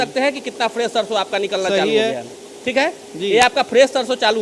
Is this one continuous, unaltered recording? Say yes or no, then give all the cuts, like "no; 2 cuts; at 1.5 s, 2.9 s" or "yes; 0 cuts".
yes; 0 cuts